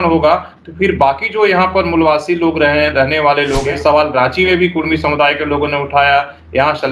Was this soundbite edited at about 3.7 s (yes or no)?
yes